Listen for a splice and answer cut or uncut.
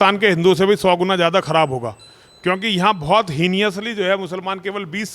uncut